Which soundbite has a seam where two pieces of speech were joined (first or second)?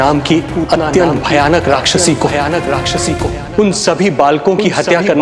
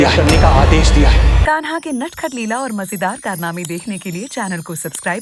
second